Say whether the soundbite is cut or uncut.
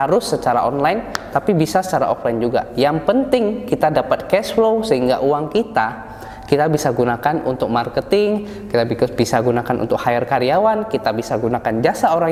uncut